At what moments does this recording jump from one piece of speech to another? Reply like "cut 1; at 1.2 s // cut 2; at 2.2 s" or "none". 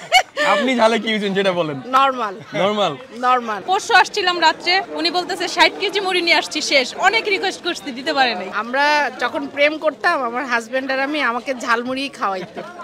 cut 1; at 3.6 s // cut 2; at 4.9 s // cut 3; at 8.5 s